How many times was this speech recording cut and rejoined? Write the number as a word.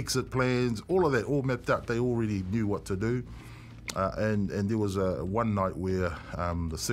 zero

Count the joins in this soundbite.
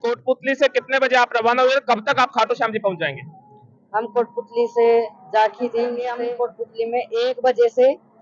one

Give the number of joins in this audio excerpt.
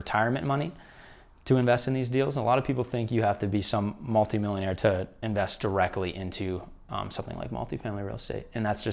one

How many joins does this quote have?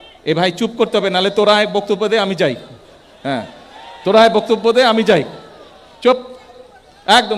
zero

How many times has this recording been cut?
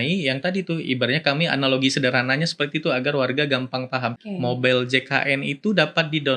one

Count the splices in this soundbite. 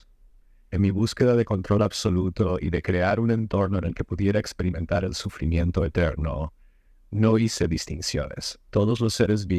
zero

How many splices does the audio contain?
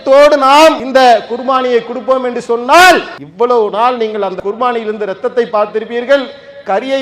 three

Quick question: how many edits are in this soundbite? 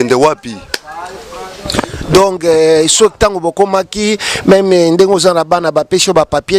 zero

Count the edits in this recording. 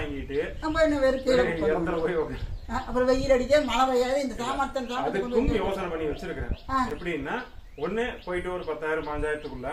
zero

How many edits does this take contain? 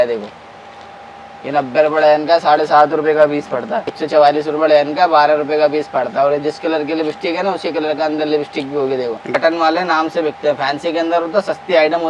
two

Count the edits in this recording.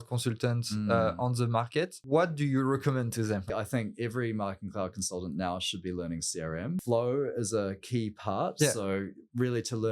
three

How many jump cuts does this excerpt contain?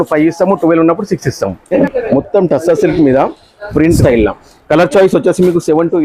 two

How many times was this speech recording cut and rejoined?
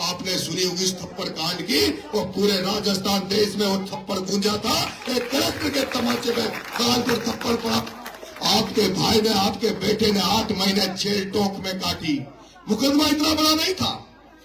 zero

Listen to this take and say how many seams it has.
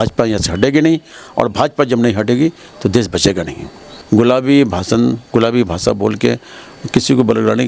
one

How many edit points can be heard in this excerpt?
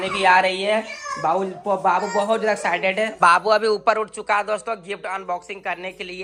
zero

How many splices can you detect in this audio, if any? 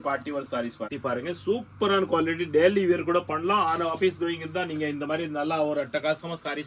one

